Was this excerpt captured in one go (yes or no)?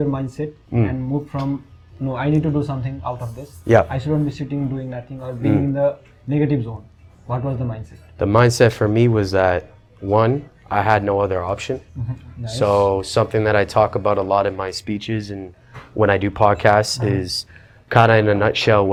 yes